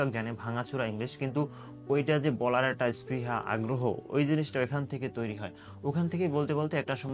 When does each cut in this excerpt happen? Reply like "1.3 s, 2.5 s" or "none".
none